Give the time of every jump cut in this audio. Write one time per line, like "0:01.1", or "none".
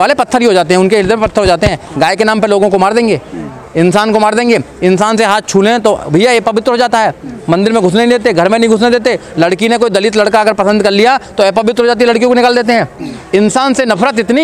none

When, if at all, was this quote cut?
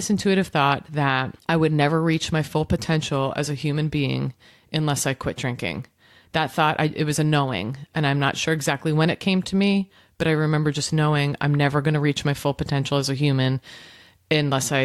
0:01.3

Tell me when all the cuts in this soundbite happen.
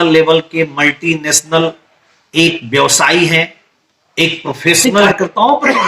0:04.8

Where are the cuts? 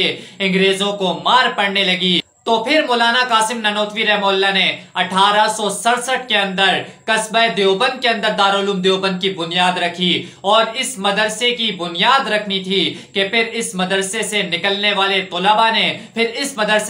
0:02.2

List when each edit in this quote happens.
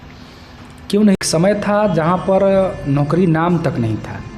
0:01.2

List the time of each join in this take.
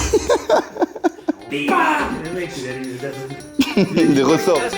0:01.4

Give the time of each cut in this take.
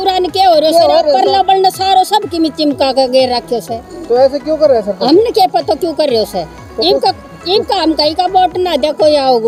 none

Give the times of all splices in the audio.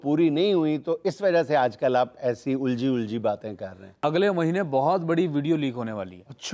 0:04.0

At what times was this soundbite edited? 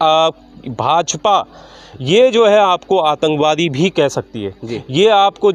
none

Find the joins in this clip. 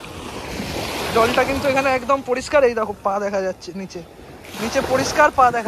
none

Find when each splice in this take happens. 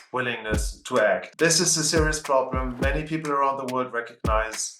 0:01.3

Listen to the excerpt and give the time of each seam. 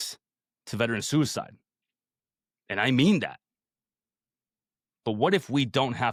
none

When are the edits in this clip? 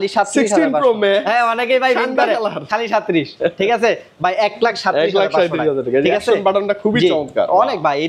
none

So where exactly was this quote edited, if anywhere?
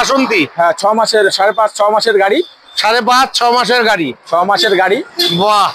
none

